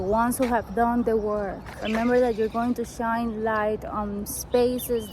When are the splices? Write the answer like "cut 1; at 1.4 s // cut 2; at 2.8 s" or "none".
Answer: cut 1; at 1.7 s